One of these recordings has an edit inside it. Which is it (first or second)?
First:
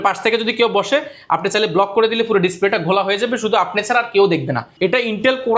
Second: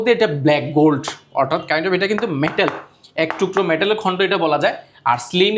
first